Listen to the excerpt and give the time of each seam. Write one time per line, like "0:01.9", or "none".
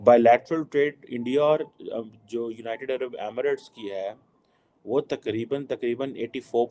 none